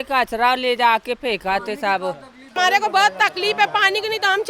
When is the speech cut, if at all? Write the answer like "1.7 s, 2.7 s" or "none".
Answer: 2.5 s

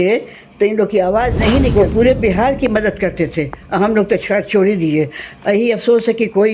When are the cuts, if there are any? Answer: 1.7 s

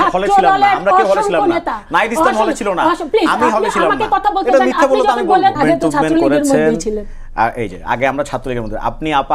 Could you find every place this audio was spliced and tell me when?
5.6 s

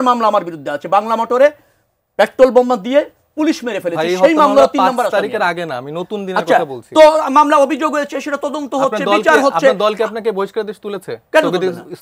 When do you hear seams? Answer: none

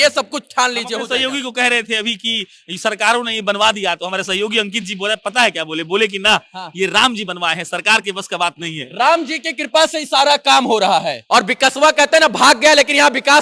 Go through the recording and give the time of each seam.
11.2 s

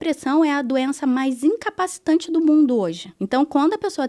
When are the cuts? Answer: 3.1 s

